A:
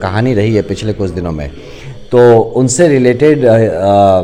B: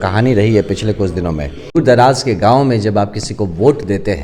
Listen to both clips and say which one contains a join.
B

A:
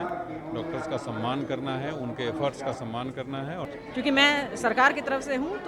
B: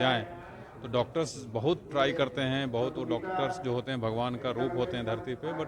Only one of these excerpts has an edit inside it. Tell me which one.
A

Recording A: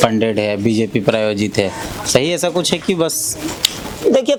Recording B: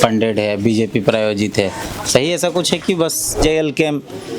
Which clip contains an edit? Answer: B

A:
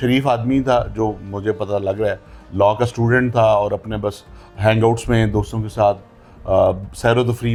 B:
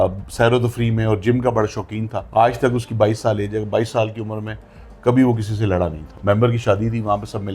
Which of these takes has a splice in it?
B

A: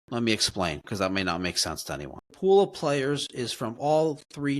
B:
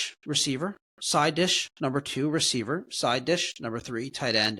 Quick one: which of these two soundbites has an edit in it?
A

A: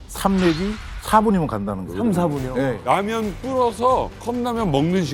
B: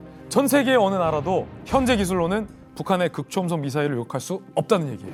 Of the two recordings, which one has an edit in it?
A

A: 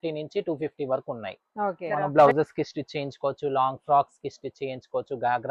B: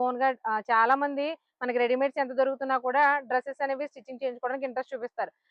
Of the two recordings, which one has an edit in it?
A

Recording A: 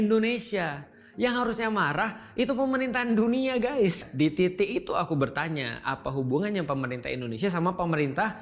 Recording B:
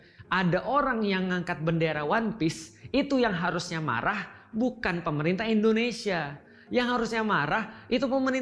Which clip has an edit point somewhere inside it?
A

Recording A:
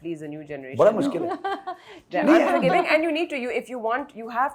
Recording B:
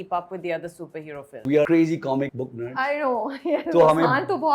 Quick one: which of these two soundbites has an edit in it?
B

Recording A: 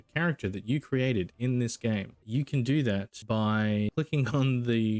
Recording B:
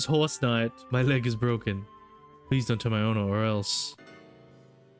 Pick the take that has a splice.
A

